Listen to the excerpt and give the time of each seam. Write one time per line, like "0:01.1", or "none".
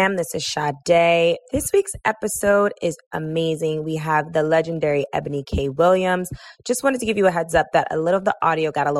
0:01.4

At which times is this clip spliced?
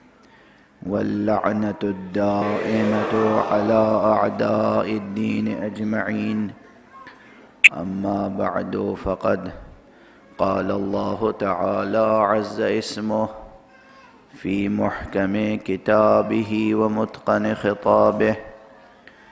0:08.5

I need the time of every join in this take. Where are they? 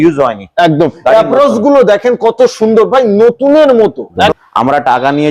0:04.3

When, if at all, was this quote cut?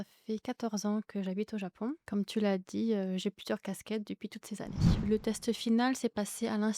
0:02.0
0:05.0

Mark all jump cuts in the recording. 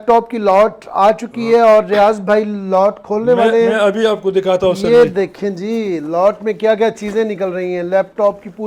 none

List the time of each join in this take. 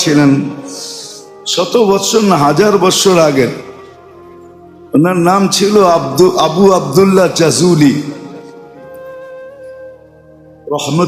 0:08.4
0:10.0

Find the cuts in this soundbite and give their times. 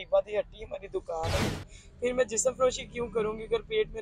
0:01.5

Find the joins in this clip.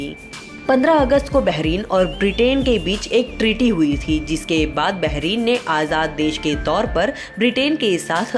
none

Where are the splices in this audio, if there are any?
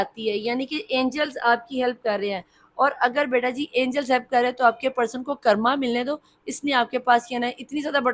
none

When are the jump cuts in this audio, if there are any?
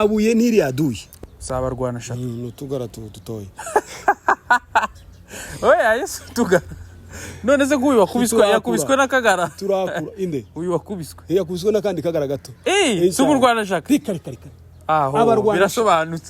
0:01.1

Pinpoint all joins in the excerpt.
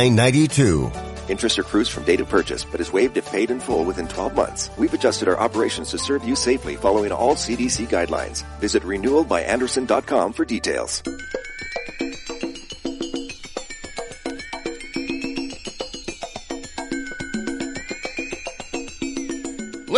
0:10.9

